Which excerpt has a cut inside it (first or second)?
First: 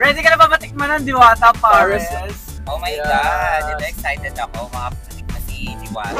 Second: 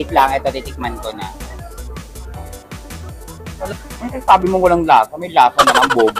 second